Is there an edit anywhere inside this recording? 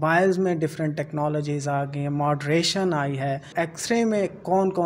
yes; 1 cut; at 3.5 s

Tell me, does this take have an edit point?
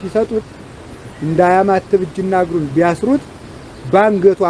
no; 0 cuts

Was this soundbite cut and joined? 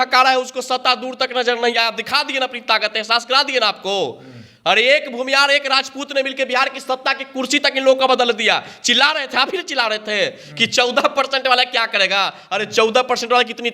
no; 0 cuts

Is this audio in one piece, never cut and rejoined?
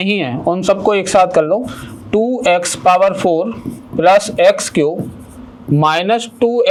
yes; 0 cuts

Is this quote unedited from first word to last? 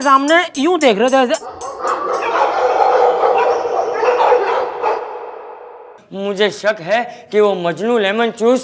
no; 1 cut; at 6.0 s

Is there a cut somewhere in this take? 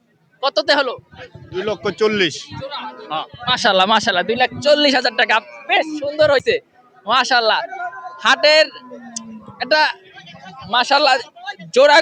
no; 0 cuts

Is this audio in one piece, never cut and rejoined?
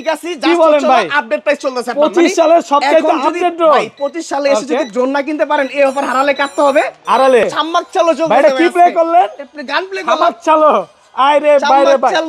no; 1 cut; at 7.4 s

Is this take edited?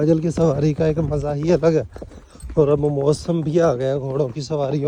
no; 0 cuts

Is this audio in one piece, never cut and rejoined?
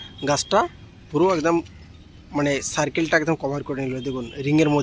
yes; 0 cuts

